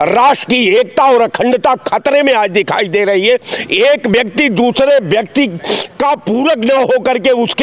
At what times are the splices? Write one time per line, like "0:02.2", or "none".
none